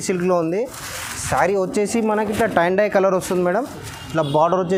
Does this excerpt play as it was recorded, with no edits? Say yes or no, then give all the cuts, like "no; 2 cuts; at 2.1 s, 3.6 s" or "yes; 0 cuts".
yes; 0 cuts